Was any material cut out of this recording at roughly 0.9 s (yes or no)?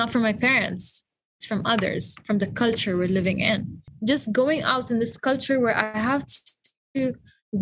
no